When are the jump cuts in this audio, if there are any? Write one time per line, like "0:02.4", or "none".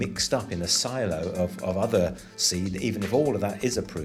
none